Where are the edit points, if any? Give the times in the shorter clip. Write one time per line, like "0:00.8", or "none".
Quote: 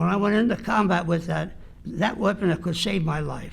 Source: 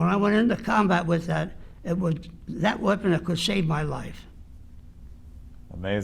0:01.7